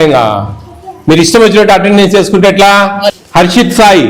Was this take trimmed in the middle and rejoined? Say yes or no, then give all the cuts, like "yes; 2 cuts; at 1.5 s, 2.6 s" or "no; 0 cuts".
yes; 1 cut; at 3.1 s